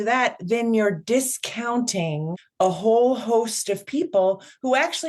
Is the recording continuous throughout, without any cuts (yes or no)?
no